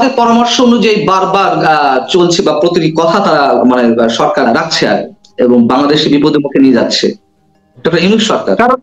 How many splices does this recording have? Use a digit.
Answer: 1